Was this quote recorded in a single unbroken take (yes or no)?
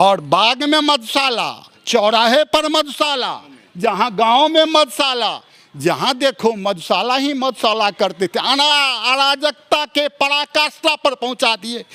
yes